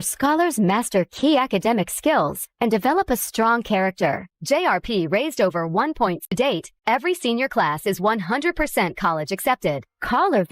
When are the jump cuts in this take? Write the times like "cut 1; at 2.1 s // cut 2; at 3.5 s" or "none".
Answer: cut 1; at 6.3 s